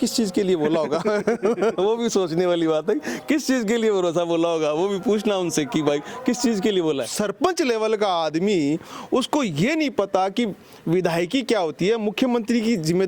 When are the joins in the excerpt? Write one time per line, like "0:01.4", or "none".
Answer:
0:07.1